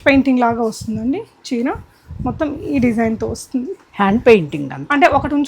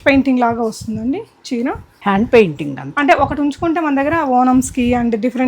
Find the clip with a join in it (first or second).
second